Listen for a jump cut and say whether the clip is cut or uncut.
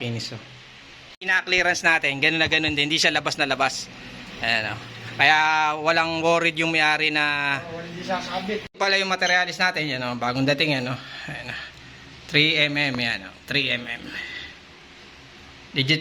cut